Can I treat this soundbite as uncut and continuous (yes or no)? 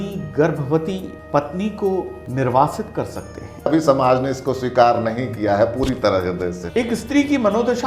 no